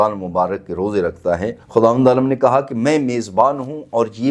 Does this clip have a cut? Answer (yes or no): yes